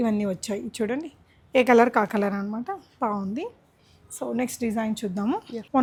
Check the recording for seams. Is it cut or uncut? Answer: uncut